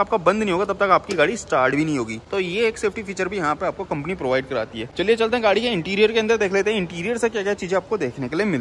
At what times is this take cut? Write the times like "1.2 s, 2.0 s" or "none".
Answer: none